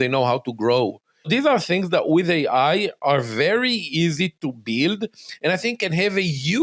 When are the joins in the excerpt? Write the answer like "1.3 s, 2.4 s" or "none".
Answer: 1.3 s